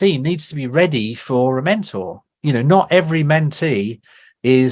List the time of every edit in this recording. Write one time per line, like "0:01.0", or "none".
none